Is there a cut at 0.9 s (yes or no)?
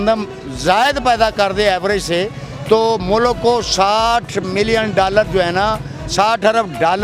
no